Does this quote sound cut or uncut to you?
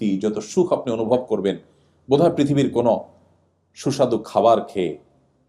uncut